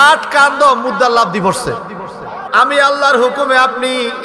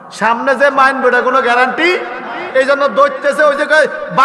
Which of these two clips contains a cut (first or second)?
first